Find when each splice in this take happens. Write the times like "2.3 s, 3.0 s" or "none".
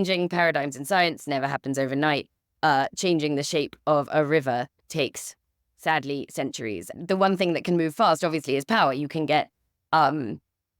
6.9 s